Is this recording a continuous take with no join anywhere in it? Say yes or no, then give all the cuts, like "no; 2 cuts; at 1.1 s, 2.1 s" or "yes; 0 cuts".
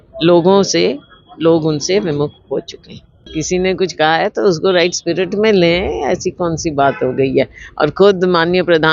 no; 1 cut; at 3.4 s